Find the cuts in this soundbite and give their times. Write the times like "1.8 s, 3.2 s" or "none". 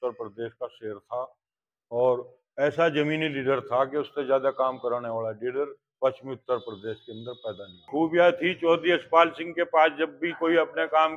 7.9 s